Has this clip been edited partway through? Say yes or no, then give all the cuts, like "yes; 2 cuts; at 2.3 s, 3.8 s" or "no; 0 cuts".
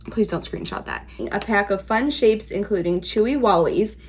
yes; 1 cut; at 1.2 s